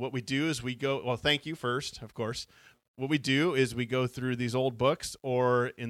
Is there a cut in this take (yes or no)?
yes